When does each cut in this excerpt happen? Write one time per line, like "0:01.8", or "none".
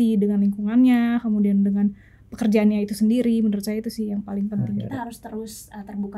0:04.9